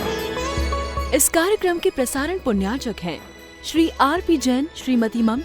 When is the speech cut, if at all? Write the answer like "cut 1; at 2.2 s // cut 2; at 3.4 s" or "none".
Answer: cut 1; at 1.0 s